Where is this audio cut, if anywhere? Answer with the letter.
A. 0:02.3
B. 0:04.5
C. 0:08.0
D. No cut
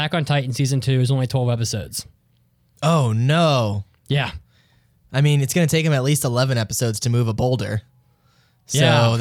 D